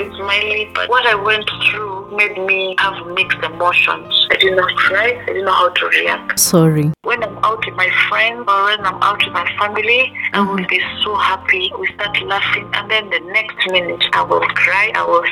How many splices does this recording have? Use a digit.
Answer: 1